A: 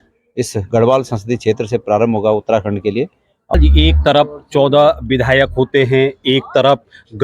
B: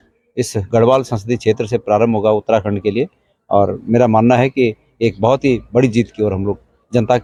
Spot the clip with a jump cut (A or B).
A